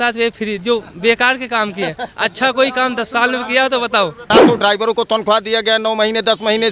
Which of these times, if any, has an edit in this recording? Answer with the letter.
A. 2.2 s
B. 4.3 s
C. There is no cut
B